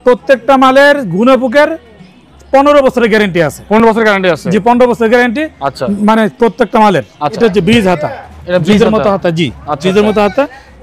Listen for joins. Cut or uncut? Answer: uncut